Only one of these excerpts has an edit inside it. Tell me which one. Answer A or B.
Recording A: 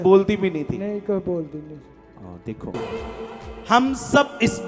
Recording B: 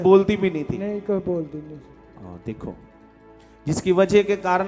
A